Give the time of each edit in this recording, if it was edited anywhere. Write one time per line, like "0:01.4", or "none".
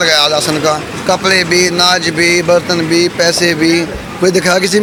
none